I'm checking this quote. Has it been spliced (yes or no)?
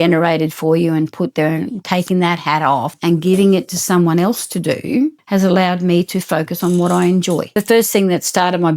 yes